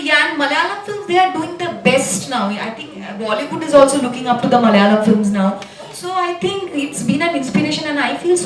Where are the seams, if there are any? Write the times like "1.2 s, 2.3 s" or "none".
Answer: none